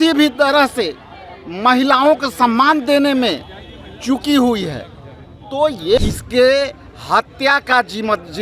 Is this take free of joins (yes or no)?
no